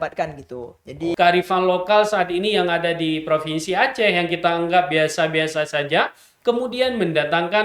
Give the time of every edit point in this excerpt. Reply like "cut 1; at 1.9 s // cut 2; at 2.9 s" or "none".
cut 1; at 1.1 s